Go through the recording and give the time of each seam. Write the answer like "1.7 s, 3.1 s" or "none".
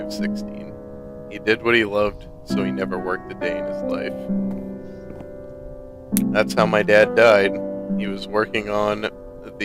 none